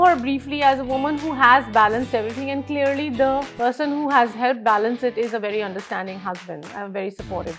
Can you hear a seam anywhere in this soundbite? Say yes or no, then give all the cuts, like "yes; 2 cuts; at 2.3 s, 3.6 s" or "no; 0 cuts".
no; 0 cuts